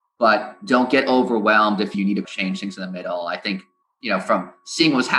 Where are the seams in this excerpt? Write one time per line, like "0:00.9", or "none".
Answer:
0:02.3